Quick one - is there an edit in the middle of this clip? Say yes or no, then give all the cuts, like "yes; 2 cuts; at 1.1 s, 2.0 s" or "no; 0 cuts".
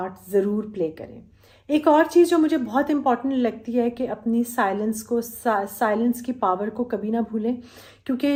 no; 0 cuts